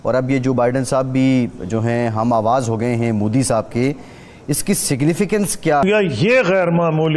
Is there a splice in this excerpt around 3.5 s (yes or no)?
no